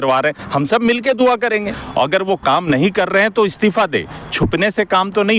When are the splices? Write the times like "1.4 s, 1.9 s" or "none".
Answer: 1.6 s